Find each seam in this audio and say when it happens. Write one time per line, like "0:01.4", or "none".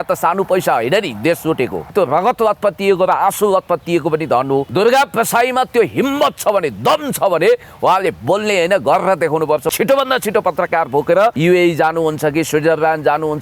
0:01.9
0:04.7
0:09.7
0:11.4